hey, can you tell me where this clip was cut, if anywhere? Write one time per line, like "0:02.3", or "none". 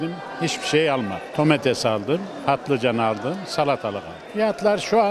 0:01.3
0:04.2